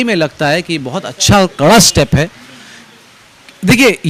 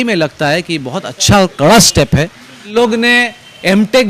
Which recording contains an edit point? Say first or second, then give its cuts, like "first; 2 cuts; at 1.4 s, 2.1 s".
second; 1 cut; at 2.7 s